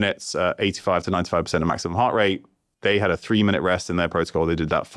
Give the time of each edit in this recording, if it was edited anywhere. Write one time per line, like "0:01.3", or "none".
none